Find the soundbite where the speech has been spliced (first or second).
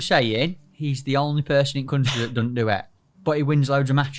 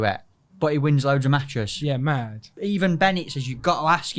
second